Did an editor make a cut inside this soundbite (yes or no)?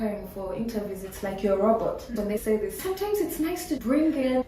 yes